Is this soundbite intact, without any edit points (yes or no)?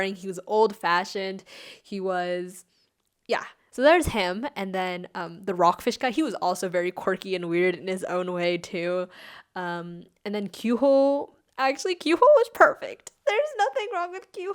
no